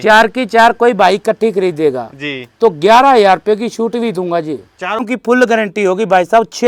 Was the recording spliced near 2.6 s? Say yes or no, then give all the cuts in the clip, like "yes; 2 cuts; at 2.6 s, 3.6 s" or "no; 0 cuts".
no; 1 cut; at 5.0 s